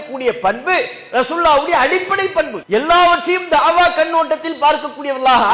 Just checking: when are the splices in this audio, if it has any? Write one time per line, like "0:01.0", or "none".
0:02.6